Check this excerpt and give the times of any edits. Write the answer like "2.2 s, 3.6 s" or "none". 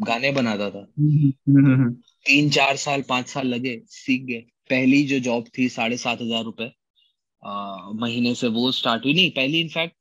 4.5 s

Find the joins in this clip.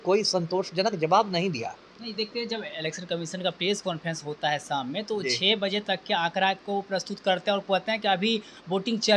none

